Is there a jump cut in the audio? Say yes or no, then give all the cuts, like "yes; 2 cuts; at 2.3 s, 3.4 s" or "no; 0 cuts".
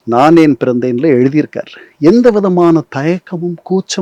no; 0 cuts